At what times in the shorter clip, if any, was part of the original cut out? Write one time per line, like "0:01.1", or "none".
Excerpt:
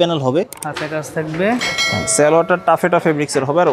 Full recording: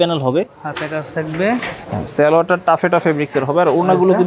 none